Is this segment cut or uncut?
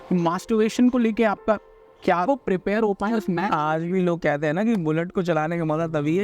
cut